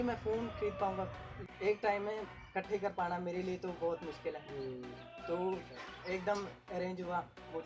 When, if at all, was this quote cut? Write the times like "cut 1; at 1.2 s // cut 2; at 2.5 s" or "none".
cut 1; at 1.3 s